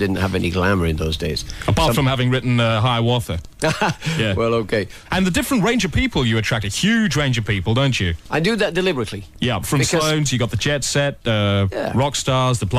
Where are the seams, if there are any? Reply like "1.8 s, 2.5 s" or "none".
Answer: none

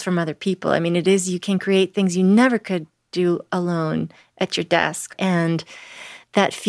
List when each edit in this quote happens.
5.1 s

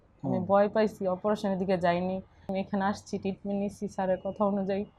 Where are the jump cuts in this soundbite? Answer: 2.5 s

